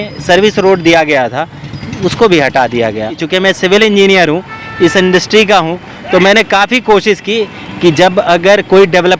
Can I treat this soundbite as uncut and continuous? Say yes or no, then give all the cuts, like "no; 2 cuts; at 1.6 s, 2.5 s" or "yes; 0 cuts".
no; 1 cut; at 3.2 s